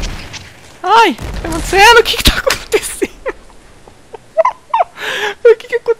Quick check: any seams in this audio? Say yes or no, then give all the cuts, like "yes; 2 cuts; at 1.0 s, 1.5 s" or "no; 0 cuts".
no; 0 cuts